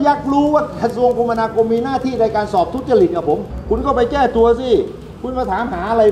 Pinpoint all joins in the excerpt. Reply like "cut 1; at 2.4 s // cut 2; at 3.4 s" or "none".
cut 1; at 3.5 s